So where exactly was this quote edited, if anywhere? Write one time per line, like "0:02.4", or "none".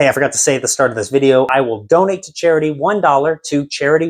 0:01.5